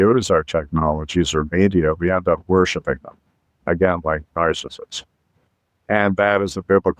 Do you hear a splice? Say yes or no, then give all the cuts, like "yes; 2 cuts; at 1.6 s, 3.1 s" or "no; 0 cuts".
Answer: no; 0 cuts